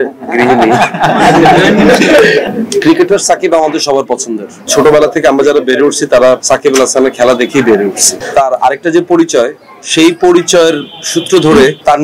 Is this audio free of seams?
no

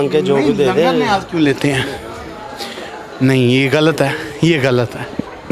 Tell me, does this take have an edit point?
no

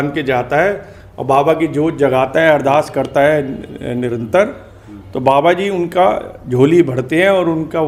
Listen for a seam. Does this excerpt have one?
no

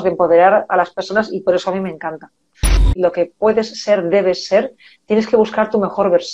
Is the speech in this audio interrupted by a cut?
yes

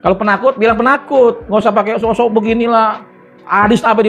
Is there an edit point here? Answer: no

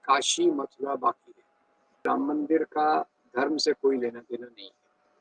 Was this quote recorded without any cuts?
no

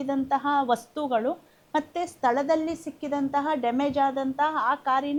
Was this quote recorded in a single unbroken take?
yes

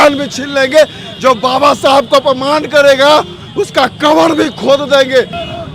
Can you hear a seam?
no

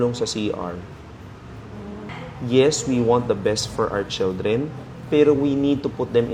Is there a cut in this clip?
no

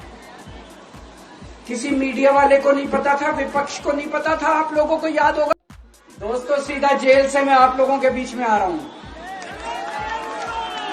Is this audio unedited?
no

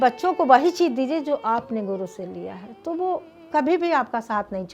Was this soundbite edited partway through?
yes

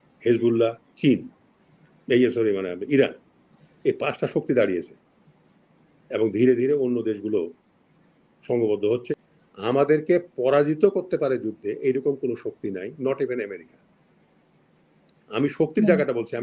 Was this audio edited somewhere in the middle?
yes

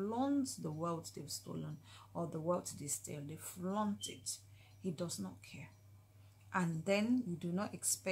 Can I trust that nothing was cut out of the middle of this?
yes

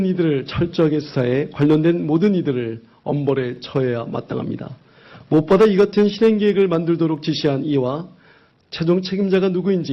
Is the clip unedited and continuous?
yes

